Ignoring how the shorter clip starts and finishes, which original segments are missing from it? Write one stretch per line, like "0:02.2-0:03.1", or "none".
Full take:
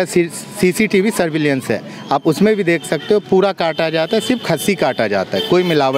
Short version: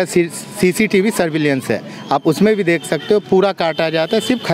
none